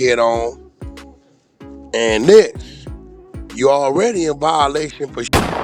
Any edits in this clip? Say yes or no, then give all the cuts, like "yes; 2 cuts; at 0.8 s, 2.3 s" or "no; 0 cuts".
no; 0 cuts